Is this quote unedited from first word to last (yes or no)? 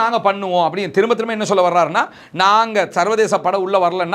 yes